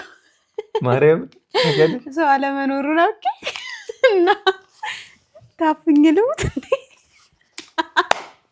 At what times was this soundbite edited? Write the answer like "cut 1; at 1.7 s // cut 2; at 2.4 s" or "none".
none